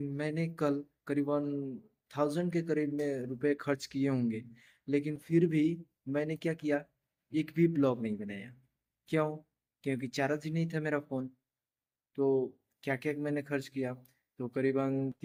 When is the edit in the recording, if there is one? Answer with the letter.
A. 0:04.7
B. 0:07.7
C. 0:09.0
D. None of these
D